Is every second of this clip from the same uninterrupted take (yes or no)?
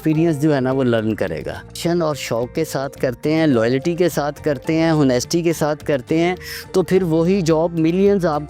no